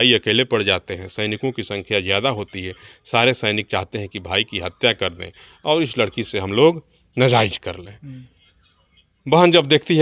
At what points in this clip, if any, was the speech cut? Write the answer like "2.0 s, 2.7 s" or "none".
none